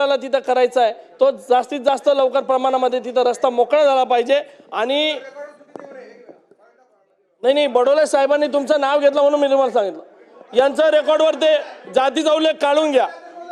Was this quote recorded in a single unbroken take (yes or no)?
yes